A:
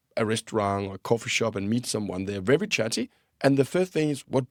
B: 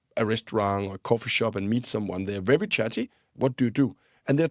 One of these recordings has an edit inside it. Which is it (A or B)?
B